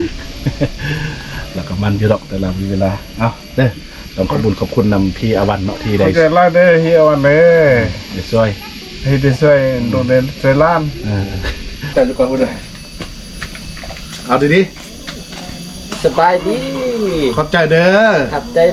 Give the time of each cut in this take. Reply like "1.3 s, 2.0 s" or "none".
11.9 s